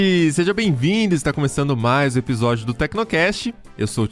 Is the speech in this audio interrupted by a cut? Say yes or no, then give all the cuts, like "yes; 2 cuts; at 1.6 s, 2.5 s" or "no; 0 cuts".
no; 0 cuts